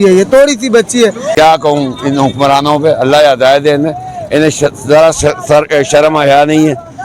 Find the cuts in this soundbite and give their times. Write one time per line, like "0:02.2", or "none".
0:01.2